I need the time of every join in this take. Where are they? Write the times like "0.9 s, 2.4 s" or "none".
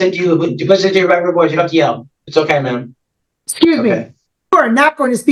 2.1 s